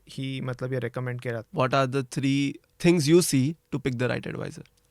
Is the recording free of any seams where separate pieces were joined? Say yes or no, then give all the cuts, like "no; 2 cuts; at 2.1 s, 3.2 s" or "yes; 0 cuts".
no; 2 cuts; at 1.4 s, 2.7 s